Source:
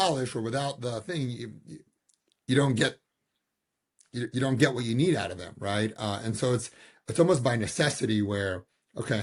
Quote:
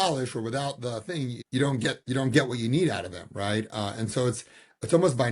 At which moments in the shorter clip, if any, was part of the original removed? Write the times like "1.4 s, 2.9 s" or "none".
1.4 s, 2.0 s

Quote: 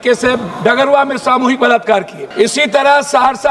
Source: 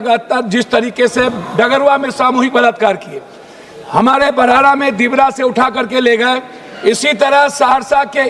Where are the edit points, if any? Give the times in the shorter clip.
2.2 s

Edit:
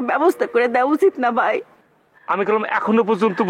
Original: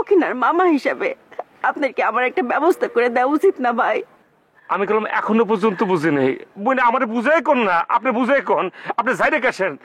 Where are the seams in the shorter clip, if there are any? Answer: none

